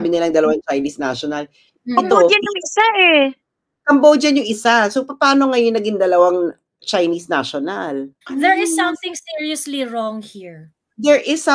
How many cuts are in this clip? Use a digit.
1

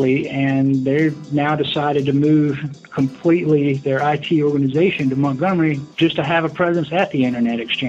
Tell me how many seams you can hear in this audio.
1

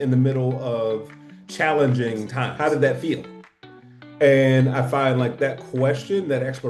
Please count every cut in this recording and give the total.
1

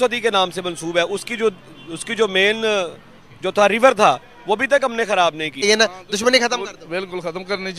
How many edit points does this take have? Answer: 1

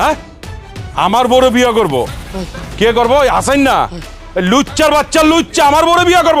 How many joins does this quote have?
1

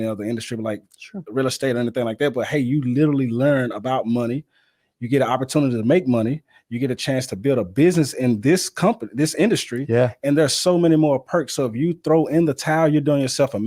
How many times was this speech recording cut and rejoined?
0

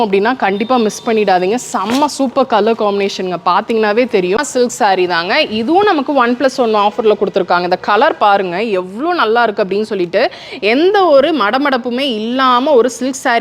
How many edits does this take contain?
1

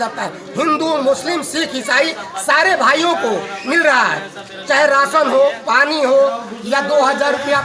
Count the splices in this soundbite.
0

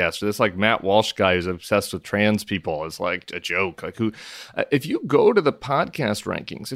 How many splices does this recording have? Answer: 0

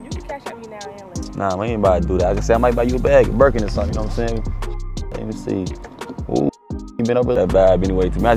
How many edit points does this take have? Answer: 1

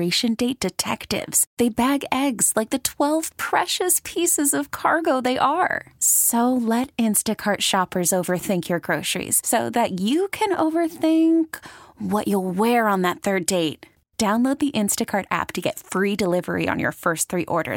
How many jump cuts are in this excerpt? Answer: 0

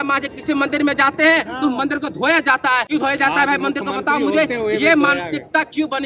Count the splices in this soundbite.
1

